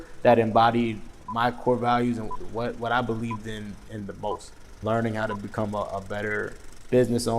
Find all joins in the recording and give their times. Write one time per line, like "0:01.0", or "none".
0:04.7